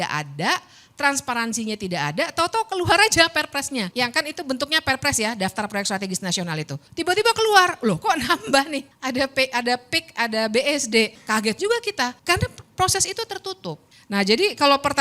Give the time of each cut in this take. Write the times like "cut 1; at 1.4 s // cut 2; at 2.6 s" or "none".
cut 1; at 3.9 s // cut 2; at 6.8 s // cut 3; at 8.9 s // cut 4; at 11.2 s // cut 5; at 12.2 s // cut 6; at 13.9 s